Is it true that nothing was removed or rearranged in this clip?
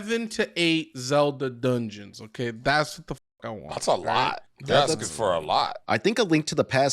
no; 2 cuts; at 4.5 s, 5.8 s

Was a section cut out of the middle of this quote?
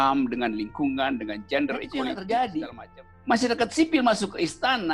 yes; 1 cut; at 1.9 s

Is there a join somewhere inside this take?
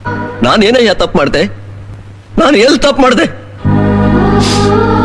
no; 0 cuts

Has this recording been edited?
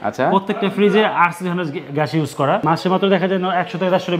yes; 1 cut; at 2.6 s

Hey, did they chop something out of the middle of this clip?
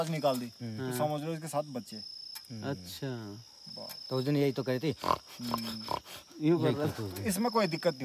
no; 0 cuts

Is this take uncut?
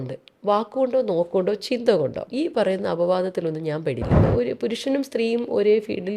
no; 2 cuts; at 2.2 s, 4.2 s

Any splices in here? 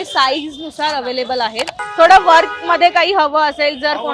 yes; 1 cut; at 1.8 s

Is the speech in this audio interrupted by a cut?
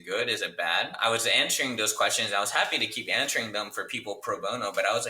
yes; 1 cut; at 0.9 s

